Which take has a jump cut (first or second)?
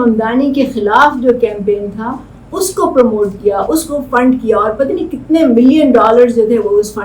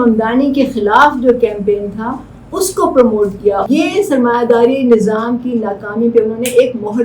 second